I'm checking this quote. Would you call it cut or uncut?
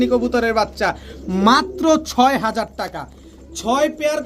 uncut